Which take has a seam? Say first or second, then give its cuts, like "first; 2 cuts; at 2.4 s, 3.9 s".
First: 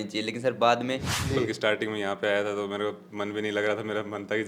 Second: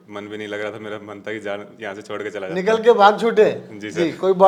first; 1 cut; at 1.1 s